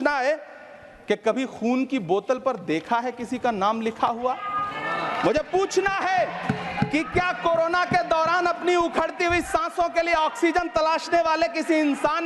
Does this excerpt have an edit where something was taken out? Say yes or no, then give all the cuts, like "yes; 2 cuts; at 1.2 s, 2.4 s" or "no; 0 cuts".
no; 0 cuts